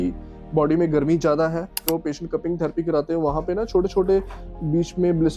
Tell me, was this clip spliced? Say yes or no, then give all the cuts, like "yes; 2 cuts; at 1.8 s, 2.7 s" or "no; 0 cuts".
yes; 1 cut; at 1.8 s